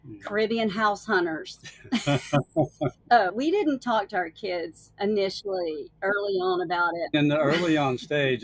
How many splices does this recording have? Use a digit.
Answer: 2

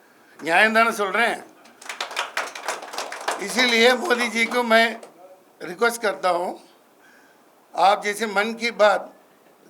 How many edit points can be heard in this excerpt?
0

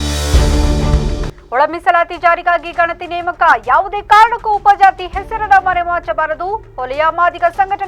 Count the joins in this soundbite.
1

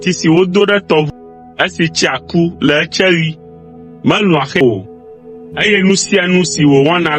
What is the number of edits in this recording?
2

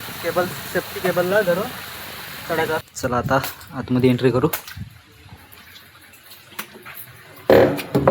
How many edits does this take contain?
1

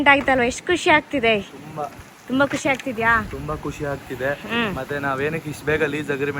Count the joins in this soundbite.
0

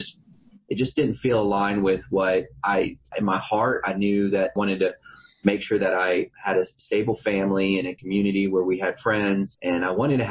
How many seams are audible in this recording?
5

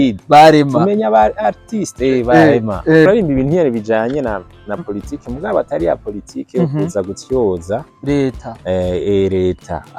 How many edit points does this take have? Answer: 1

